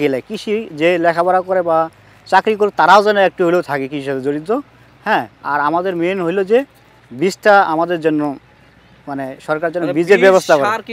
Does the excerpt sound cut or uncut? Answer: uncut